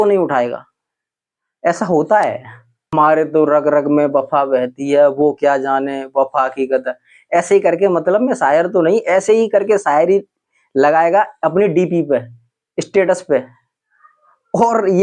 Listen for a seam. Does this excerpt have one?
yes; 1 cut; at 2.8 s

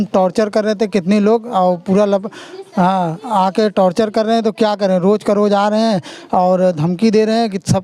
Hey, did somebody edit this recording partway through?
no; 0 cuts

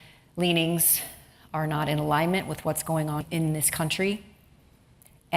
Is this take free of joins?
no; 1 cut; at 3.2 s

